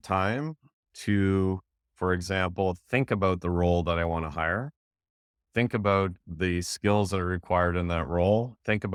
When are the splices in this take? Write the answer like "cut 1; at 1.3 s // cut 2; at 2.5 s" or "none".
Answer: none